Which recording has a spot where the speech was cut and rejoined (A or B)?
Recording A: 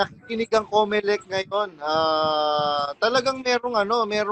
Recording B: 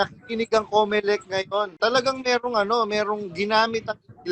B